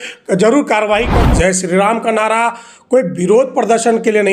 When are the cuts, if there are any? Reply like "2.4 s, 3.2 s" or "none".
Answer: 1.2 s